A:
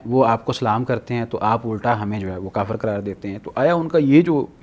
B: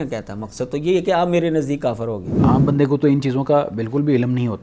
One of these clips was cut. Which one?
B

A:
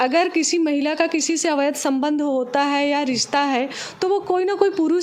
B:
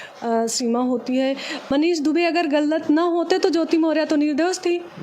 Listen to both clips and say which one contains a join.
B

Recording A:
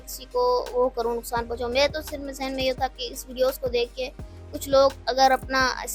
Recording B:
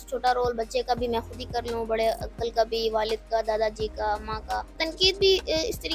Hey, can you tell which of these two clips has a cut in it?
B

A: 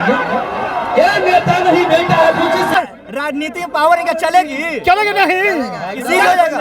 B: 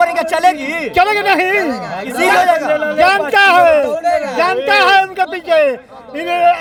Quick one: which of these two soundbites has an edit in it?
A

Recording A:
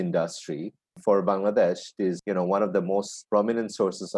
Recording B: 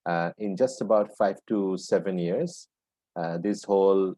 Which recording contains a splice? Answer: A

